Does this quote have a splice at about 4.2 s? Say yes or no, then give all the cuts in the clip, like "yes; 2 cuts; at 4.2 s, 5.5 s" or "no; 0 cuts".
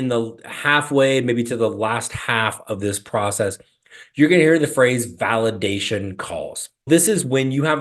no; 1 cut; at 6.9 s